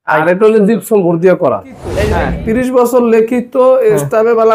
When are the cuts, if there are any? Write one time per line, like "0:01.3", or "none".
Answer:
0:01.9